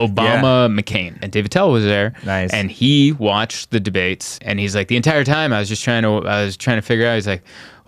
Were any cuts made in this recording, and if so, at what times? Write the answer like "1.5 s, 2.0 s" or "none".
1.2 s, 4.3 s